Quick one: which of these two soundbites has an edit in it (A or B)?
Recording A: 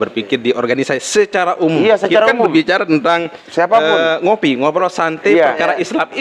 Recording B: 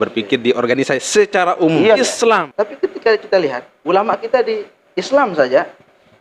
B